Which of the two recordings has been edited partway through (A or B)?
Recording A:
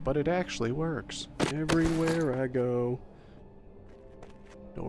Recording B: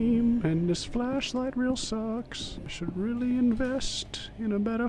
A